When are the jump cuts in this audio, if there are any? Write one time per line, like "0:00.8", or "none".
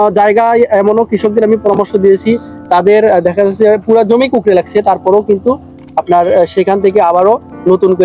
none